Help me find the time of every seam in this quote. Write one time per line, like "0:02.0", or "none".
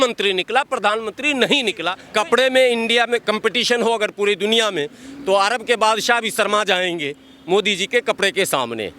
0:01.9